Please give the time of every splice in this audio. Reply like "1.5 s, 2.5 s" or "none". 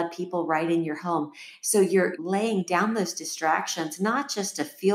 2.2 s